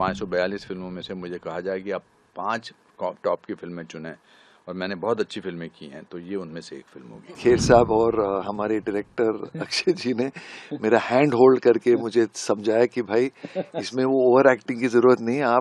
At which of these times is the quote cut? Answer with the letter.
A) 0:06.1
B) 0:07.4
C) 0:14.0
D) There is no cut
B